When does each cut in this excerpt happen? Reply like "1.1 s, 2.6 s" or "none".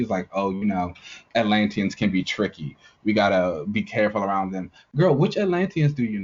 none